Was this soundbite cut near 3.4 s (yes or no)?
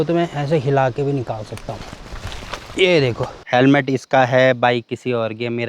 yes